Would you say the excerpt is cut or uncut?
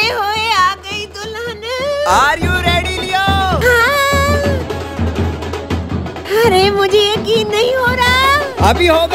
uncut